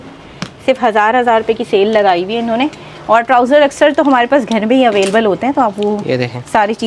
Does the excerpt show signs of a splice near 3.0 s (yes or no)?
no